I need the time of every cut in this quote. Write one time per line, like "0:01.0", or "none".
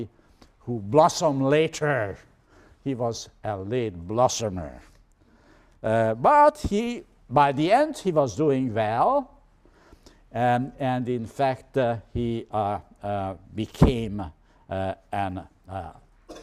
0:11.3